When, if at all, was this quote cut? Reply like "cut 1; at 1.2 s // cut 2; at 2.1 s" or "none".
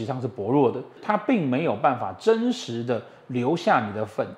cut 1; at 1.0 s